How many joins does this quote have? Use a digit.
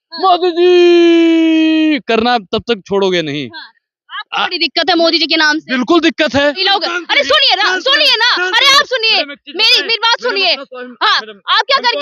1